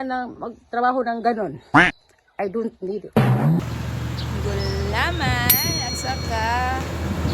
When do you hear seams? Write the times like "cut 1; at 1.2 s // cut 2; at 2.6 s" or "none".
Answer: cut 1; at 3.6 s